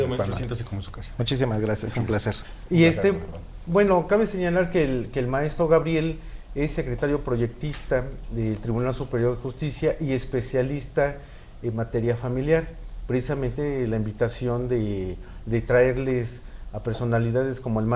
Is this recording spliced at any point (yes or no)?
no